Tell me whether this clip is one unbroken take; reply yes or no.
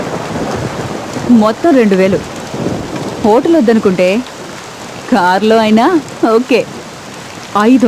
yes